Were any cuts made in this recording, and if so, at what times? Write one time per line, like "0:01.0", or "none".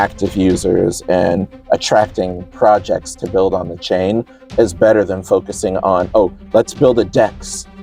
none